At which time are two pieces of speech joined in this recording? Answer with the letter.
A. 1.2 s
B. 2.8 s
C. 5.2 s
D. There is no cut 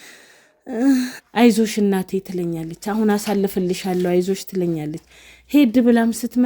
A